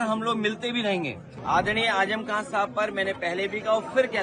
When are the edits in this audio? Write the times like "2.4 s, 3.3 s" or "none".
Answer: 1.3 s

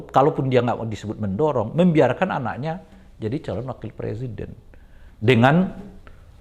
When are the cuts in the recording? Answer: none

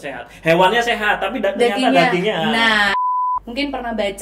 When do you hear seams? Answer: 3.0 s

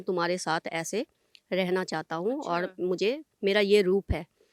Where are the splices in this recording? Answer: none

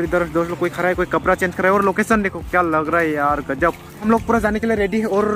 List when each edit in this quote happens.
none

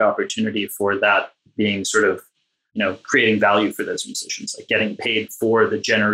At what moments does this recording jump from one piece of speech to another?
none

